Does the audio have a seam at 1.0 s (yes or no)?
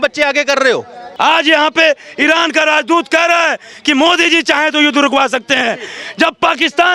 yes